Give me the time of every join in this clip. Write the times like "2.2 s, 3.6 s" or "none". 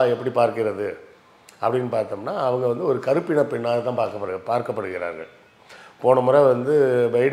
none